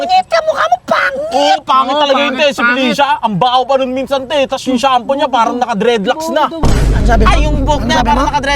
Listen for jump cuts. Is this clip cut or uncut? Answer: uncut